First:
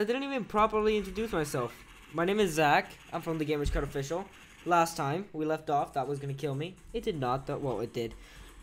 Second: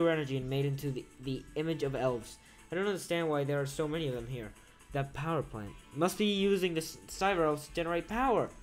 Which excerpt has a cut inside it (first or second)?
first